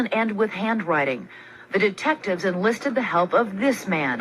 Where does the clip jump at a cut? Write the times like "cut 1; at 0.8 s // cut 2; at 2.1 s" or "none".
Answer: cut 1; at 1.6 s